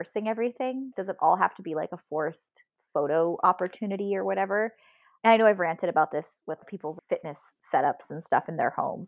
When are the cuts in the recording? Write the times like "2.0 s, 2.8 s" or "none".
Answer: none